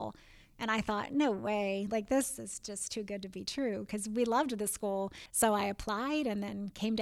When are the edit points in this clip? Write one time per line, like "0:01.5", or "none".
0:05.2